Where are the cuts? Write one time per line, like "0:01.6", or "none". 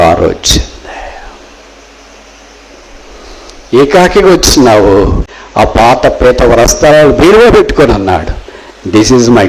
0:05.8